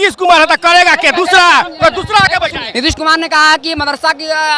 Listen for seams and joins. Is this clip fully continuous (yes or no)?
no